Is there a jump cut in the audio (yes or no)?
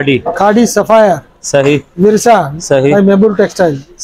no